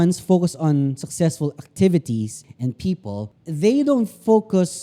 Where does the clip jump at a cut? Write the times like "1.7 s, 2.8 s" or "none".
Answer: 2.4 s, 3.4 s